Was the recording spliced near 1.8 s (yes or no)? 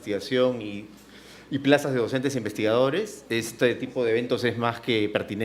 yes